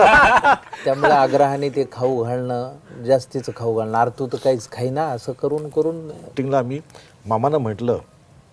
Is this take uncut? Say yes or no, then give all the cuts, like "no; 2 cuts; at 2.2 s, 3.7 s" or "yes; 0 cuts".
no; 1 cut; at 6.3 s